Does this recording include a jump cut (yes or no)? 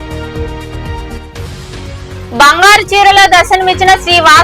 no